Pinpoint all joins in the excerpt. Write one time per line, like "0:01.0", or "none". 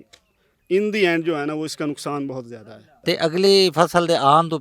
0:03.0